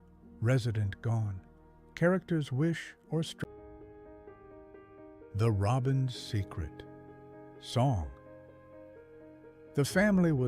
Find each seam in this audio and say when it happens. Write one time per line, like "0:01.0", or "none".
0:03.4